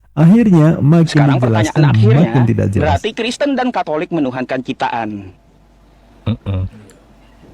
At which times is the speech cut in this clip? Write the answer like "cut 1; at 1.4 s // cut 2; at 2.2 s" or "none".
cut 1; at 2.8 s

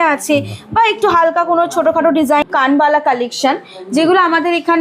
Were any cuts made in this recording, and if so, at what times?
cut 1; at 2.4 s

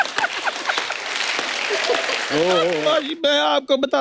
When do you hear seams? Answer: cut 1; at 2.8 s

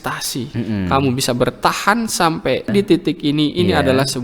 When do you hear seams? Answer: cut 1; at 2.7 s

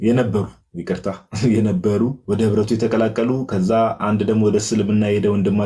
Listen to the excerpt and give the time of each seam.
cut 1; at 2.2 s

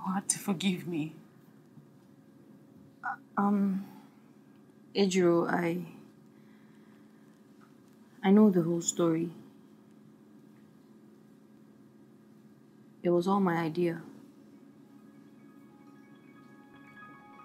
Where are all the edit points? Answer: cut 1; at 11.6 s // cut 2; at 16.7 s

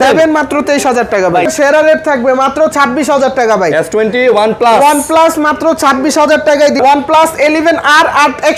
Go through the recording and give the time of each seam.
cut 1; at 1.5 s // cut 2; at 6.8 s

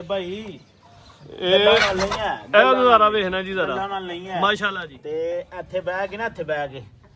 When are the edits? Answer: none

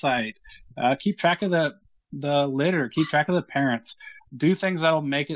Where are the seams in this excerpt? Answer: none

